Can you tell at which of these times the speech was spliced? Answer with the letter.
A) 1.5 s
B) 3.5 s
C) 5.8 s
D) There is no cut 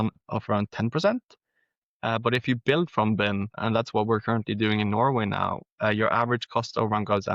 B